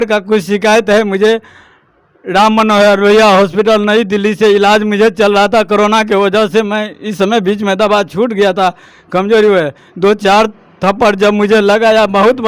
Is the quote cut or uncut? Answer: uncut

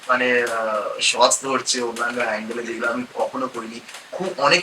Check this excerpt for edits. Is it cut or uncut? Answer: uncut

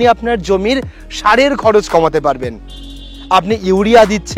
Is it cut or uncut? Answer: uncut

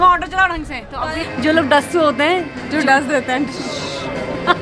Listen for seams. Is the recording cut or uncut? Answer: cut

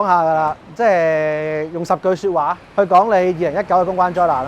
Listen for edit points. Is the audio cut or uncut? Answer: cut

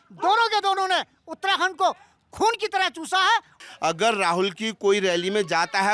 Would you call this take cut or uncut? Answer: cut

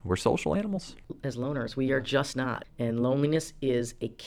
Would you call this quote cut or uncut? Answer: cut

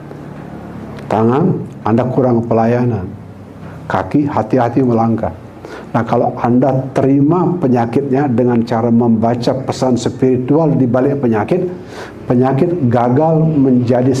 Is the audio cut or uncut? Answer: uncut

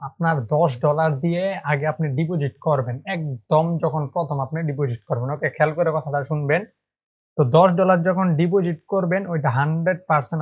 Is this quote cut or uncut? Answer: uncut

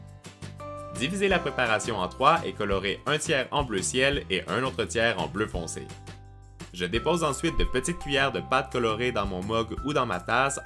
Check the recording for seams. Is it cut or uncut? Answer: uncut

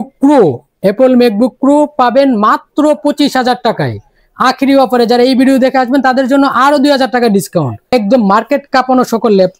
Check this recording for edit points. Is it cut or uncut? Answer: cut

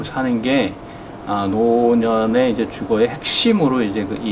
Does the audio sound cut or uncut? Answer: uncut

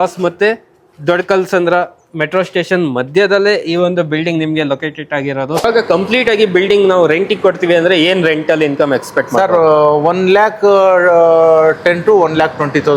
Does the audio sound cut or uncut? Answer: cut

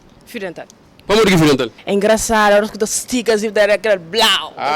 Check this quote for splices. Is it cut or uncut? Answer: cut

